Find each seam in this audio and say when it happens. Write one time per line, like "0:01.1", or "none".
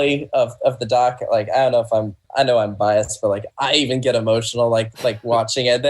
0:02.2